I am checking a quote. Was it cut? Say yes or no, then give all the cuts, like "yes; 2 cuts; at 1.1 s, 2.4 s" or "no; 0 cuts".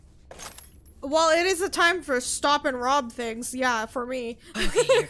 no; 0 cuts